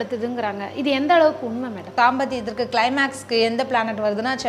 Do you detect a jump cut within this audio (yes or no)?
yes